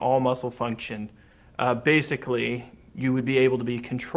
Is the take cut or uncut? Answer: uncut